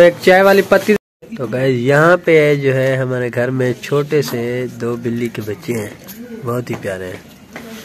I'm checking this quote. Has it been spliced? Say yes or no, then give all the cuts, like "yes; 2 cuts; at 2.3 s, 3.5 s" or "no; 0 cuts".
yes; 1 cut; at 0.9 s